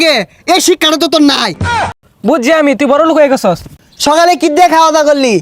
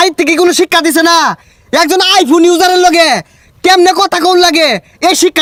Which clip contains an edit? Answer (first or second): first